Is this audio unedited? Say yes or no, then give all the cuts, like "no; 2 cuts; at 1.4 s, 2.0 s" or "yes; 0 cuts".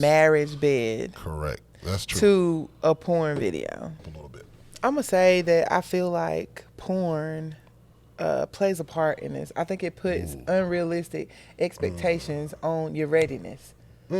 no; 1 cut; at 4.0 s